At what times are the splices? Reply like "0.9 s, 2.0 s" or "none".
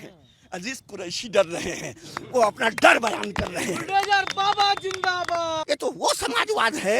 5.6 s